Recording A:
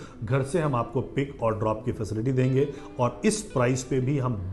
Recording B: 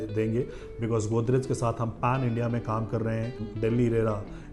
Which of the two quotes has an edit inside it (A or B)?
B